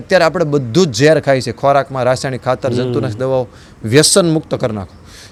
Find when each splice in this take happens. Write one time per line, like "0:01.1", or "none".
none

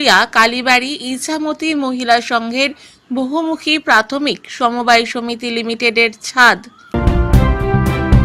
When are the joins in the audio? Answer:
0:06.9

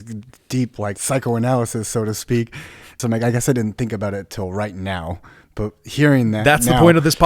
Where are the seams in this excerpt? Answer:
0:01.0
0:03.0

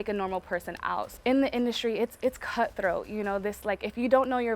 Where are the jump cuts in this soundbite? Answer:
0:01.1

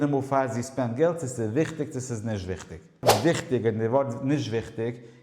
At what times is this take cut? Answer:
0:03.1

